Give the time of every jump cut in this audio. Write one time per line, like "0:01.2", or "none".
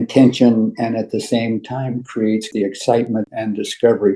0:02.4